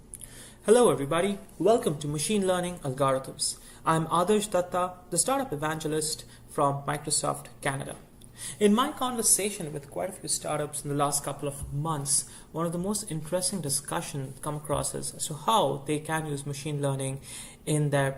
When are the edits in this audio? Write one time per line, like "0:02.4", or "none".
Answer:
none